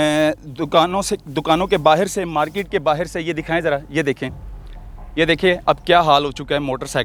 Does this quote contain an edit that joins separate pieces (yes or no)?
no